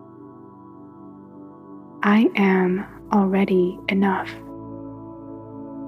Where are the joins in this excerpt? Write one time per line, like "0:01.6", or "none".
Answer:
0:02.0
0:04.2